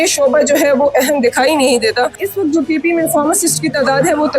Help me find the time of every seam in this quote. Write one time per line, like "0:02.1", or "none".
0:02.2

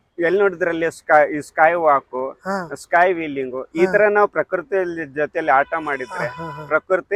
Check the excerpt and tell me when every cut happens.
none

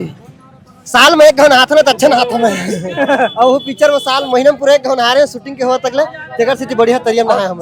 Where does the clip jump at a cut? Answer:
none

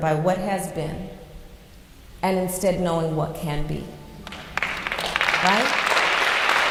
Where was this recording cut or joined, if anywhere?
none

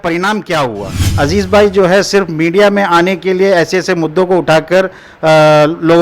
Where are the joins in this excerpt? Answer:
0:01.1

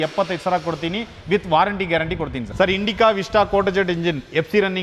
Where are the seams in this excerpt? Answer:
none

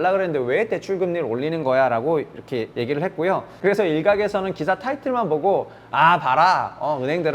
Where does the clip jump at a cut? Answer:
0:03.2

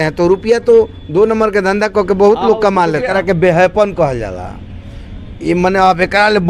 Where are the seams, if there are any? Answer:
0:03.1

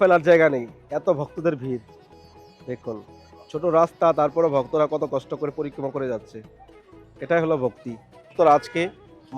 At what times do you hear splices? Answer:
0:08.3

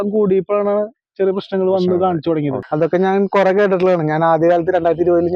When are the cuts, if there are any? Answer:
0:02.6

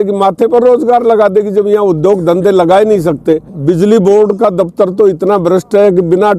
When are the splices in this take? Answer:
0:03.5

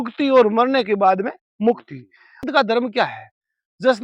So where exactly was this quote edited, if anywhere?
0:02.4

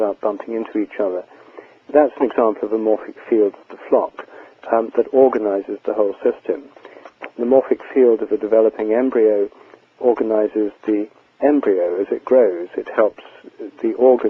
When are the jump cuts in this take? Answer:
0:07.8

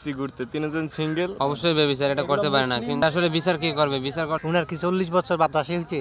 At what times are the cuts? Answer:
0:01.3
0:04.4

